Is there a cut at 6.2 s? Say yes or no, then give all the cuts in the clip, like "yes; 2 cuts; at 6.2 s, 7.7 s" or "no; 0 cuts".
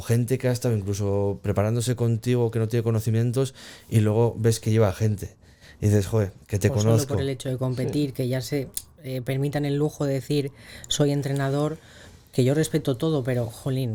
no; 0 cuts